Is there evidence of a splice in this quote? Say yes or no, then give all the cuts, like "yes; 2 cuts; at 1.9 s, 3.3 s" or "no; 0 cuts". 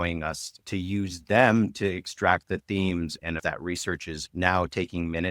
yes; 1 cut; at 3.4 s